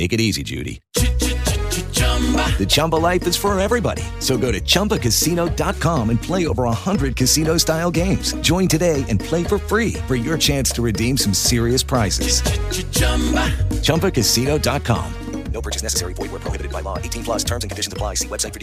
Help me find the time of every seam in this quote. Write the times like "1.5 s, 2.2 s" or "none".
none